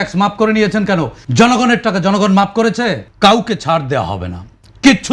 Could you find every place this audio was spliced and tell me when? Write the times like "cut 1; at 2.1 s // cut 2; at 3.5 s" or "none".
cut 1; at 1.2 s // cut 2; at 3.0 s